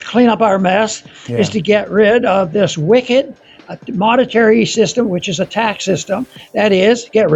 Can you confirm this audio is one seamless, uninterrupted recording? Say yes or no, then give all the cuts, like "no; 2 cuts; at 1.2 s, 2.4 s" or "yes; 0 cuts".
yes; 0 cuts